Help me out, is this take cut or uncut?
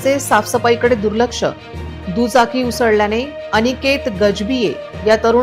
uncut